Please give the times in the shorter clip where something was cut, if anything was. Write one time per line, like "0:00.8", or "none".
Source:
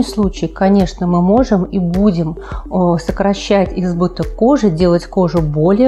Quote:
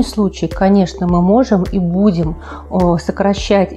none